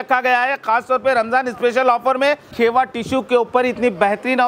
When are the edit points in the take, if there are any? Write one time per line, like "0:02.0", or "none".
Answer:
0:02.5